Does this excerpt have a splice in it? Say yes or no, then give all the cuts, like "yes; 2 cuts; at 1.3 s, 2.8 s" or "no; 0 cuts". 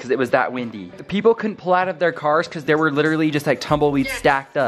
no; 0 cuts